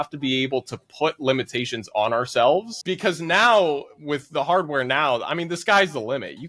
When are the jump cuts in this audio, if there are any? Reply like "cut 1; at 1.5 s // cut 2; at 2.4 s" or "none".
cut 1; at 2.8 s